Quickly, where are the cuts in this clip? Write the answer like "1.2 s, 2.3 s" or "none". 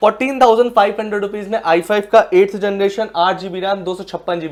none